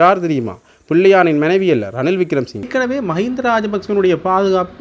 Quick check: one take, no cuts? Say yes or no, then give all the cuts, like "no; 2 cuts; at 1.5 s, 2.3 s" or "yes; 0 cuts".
no; 1 cut; at 2.7 s